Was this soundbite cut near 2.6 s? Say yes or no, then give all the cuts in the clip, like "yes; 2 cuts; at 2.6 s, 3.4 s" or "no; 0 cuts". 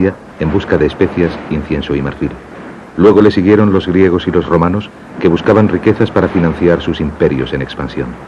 no; 1 cut; at 4.6 s